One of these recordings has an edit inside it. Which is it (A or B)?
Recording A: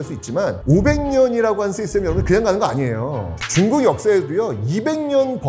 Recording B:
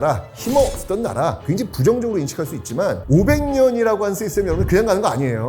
B